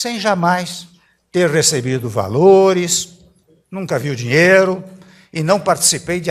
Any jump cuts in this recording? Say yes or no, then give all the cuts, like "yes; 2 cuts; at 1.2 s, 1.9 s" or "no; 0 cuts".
no; 0 cuts